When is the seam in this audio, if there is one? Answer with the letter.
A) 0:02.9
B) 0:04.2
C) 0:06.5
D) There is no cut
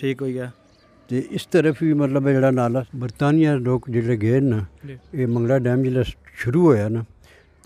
A